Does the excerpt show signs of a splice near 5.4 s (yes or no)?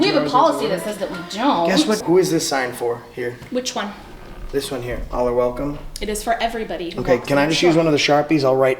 no